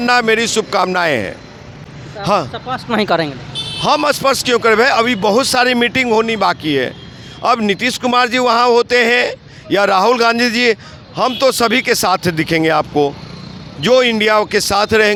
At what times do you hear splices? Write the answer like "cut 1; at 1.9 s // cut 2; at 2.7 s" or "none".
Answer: none